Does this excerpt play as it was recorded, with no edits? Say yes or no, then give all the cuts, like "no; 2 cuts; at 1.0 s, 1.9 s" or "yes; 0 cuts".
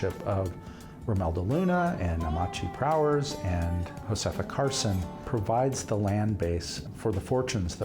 no; 3 cuts; at 3.9 s, 5.1 s, 6.8 s